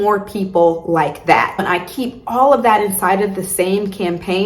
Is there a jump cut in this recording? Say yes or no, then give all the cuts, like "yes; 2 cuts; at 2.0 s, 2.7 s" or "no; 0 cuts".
yes; 1 cut; at 1.6 s